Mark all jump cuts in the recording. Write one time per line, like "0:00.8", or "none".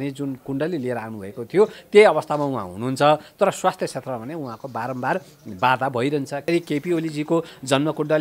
0:06.4